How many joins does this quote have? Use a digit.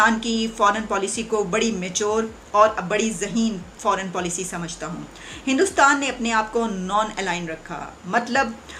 0